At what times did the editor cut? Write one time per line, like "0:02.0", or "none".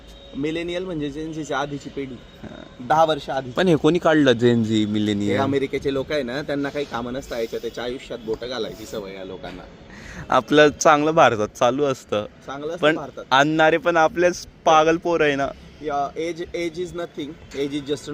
none